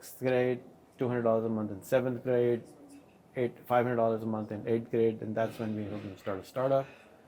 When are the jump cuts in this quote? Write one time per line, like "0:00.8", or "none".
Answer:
none